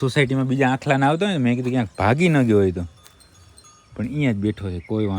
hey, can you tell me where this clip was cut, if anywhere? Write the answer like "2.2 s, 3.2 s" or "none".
none